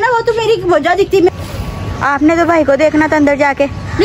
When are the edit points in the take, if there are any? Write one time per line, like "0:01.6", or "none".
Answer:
0:01.3